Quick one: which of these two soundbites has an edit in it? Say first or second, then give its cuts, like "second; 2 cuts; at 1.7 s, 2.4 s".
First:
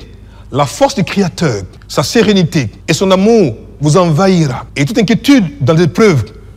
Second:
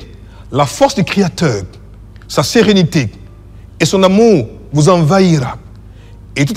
first; 3 cuts; at 1.7 s, 2.8 s, 4.7 s